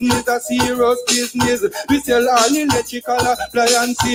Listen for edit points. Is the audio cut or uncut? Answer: uncut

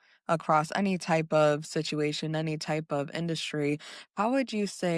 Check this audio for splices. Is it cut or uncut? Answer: uncut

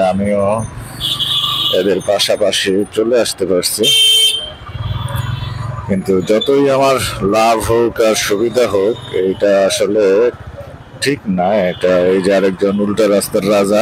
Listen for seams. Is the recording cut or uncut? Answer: uncut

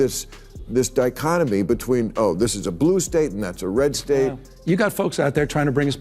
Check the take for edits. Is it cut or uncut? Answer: cut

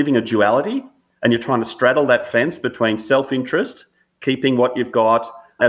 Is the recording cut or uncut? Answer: uncut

